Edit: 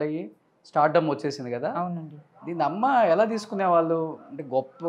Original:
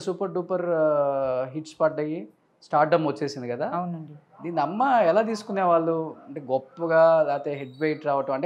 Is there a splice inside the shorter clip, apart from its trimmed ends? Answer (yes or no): no